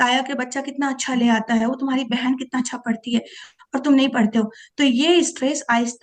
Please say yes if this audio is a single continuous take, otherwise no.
yes